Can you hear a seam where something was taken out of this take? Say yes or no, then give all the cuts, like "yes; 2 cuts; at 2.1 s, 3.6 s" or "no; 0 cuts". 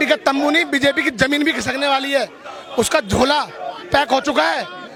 no; 0 cuts